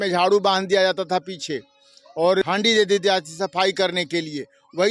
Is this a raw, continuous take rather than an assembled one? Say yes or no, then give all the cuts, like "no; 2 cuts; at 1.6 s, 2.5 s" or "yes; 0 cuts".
no; 1 cut; at 2.4 s